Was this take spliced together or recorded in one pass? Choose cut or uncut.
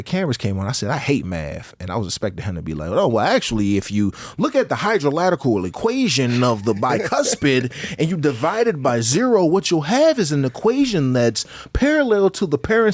uncut